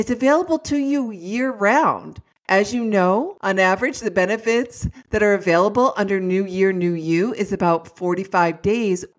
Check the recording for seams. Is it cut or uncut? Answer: cut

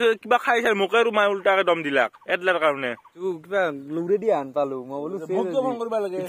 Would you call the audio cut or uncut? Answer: cut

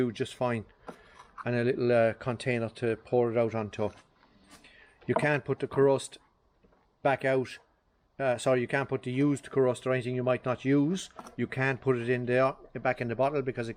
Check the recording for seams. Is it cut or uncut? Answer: uncut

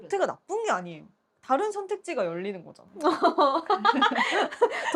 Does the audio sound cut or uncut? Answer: uncut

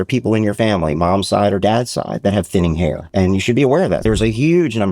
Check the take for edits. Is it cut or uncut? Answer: cut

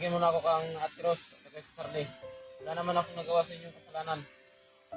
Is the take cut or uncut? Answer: uncut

